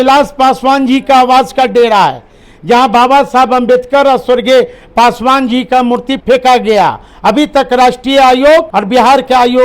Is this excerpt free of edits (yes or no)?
no